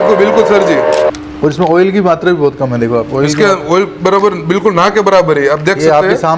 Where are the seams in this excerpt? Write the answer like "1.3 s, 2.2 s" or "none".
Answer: 1.1 s

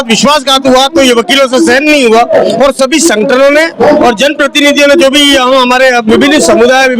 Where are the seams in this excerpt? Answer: none

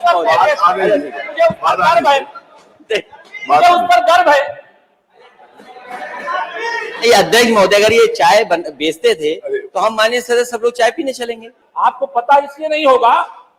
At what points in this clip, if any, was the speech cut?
11.5 s

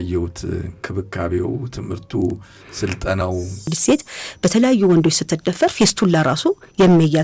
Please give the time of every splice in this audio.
3.7 s

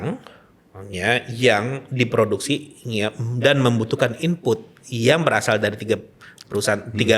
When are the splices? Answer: none

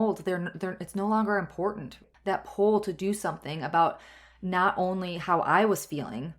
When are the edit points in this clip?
1.9 s

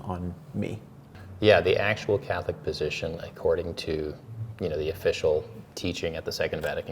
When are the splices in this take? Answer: 1.1 s

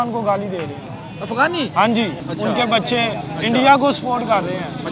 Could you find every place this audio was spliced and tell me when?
2.2 s

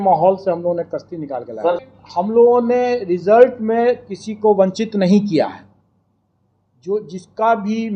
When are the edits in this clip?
1.8 s

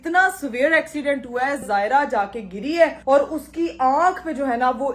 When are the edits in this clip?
1.7 s

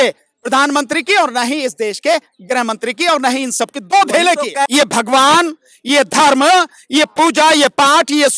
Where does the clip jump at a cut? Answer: 4.7 s

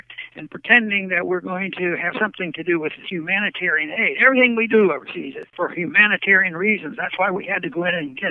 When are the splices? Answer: 5.4 s

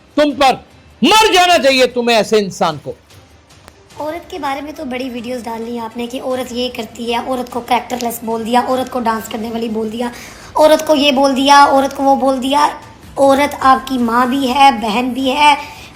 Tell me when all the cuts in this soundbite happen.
3.5 s

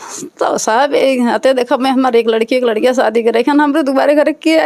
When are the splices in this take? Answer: none

